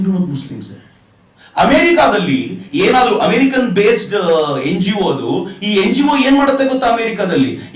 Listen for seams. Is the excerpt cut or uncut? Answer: uncut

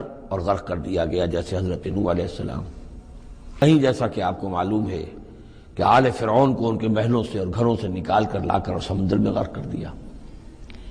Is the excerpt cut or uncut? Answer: cut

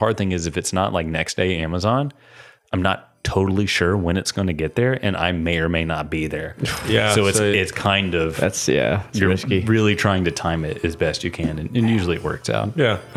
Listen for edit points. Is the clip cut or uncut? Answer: uncut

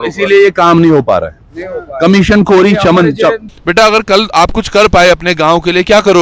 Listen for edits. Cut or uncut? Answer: cut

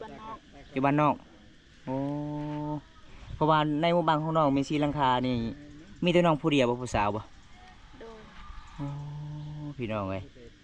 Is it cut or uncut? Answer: uncut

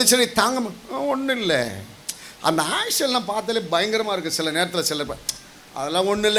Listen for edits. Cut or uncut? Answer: uncut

